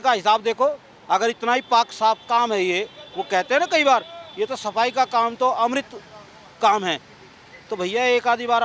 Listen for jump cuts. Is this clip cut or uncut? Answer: uncut